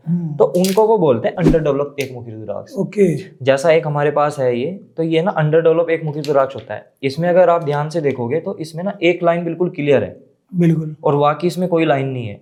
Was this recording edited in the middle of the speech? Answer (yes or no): no